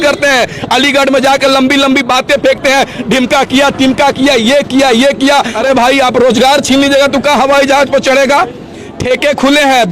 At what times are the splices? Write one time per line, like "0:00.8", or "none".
0:05.5

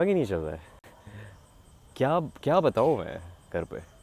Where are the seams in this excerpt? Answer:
none

